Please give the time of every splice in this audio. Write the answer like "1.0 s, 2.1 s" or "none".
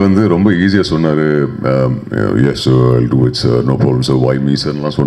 none

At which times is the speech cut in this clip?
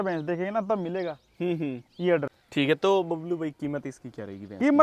2.4 s

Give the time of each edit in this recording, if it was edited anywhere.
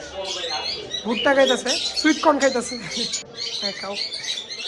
3.2 s

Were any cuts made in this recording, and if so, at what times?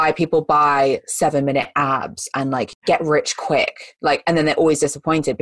2.7 s

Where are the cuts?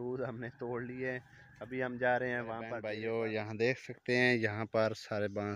2.6 s

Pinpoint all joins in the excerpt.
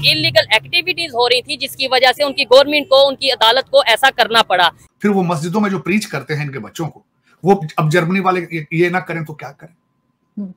4.8 s

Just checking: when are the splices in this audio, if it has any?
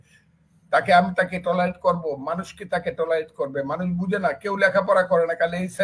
none

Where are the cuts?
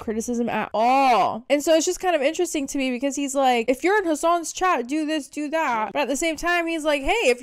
none

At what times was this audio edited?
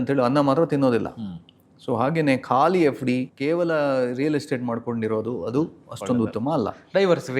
3.3 s

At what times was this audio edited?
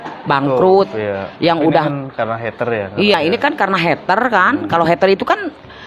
none

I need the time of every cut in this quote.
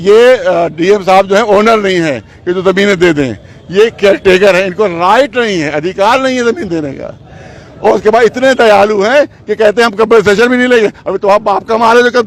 none

